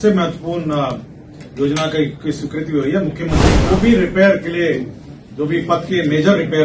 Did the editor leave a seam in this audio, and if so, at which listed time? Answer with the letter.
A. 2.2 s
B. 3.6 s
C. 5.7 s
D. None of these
B